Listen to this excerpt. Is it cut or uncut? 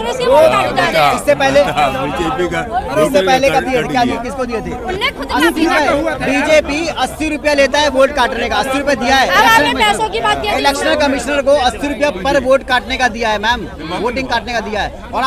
uncut